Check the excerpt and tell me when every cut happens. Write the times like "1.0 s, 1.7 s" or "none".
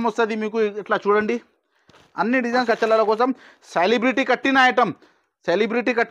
2.6 s